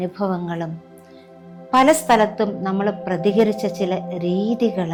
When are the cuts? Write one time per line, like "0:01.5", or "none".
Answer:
none

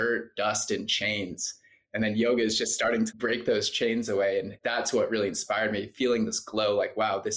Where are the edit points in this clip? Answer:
0:03.1
0:04.6

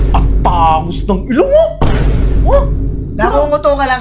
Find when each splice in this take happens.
none

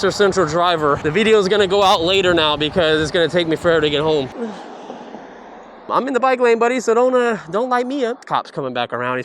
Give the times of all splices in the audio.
0:01.0
0:04.3
0:05.9
0:08.2

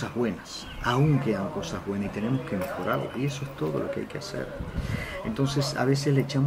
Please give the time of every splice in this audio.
none

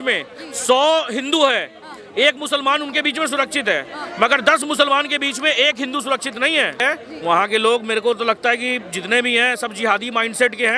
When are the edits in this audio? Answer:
0:06.8

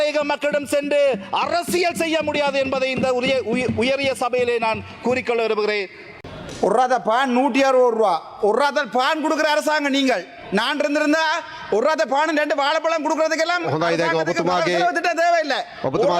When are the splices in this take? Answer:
0:06.3

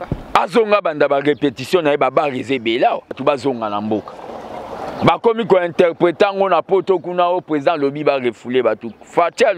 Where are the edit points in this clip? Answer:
0:03.2

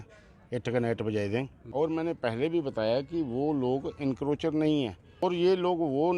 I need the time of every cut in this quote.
0:01.6
0:05.0

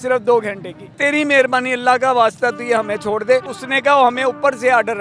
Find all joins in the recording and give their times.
0:01.0
0:03.6

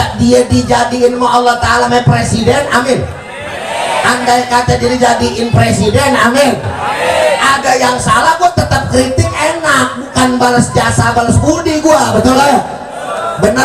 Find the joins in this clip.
0:01.9

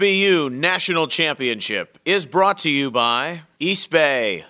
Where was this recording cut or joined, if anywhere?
0:03.4

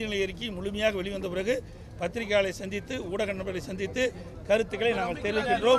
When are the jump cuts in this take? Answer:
none

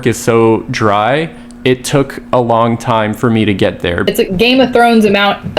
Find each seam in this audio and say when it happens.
0:04.1

